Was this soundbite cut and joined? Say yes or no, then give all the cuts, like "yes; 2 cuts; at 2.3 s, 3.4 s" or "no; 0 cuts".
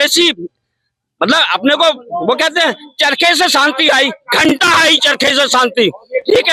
no; 0 cuts